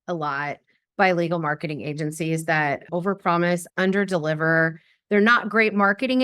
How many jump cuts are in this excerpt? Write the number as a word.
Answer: two